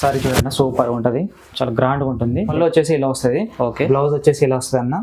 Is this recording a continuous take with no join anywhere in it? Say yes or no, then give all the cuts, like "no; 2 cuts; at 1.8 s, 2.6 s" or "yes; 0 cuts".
no; 1 cut; at 2.5 s